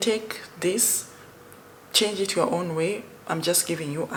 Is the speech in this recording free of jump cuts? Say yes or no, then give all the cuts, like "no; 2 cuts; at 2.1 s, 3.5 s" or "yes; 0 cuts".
yes; 0 cuts